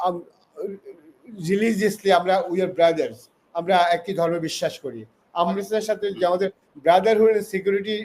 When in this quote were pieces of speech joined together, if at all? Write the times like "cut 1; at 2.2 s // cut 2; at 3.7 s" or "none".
cut 1; at 5.5 s